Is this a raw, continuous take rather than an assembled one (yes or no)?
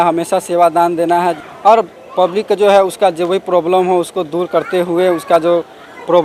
no